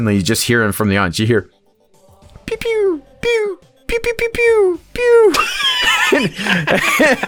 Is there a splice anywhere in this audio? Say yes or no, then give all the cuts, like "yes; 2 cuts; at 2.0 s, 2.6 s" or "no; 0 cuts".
no; 0 cuts